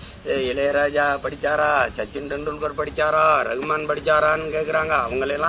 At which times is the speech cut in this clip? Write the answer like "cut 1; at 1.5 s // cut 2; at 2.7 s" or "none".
none